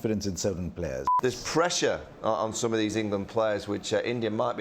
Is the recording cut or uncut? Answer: cut